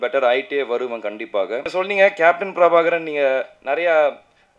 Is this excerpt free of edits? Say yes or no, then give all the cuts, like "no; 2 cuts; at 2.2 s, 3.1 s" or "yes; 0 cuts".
no; 1 cut; at 1.7 s